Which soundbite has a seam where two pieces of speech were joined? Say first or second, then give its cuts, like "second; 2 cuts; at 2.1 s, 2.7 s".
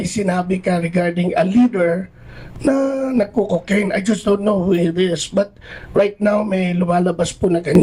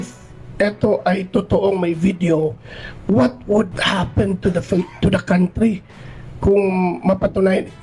second; 1 cut; at 3.8 s